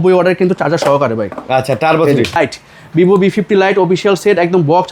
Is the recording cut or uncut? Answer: cut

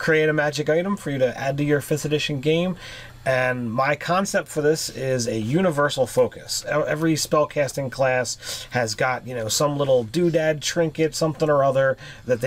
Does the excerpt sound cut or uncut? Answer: cut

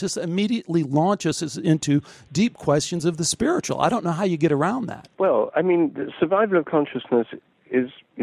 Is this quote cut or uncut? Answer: uncut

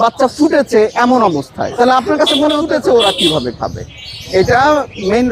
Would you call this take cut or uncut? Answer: cut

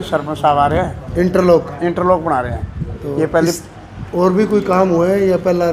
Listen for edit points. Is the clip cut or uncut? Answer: uncut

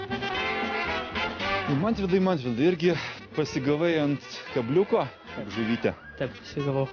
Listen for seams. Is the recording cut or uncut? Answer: uncut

